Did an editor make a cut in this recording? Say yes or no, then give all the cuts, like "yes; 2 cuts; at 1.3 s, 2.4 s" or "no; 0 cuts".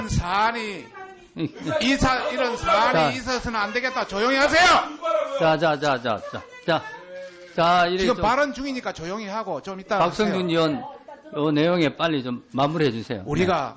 yes; 1 cut; at 5.4 s